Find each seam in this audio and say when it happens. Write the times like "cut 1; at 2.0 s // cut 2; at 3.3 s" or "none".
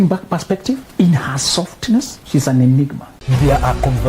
cut 1; at 0.9 s // cut 2; at 2.2 s // cut 3; at 3.1 s